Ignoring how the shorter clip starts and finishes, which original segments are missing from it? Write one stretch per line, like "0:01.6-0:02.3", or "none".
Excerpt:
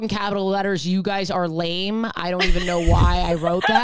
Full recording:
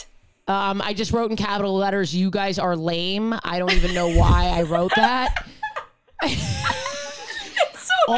none